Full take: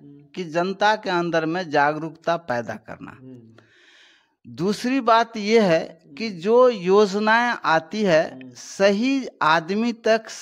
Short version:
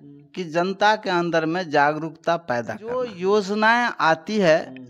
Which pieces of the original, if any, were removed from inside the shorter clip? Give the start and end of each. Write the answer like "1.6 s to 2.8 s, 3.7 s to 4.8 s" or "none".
3.1 s to 6.7 s